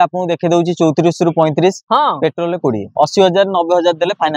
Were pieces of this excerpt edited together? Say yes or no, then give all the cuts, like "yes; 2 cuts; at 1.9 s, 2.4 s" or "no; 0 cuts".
yes; 1 cut; at 2.9 s